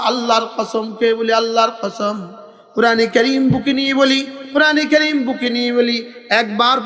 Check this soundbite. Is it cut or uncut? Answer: uncut